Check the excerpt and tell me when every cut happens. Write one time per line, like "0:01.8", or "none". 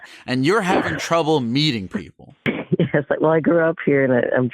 0:02.5